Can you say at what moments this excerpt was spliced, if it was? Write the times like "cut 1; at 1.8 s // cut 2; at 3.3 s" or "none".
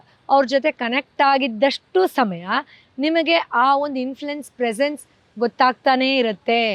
none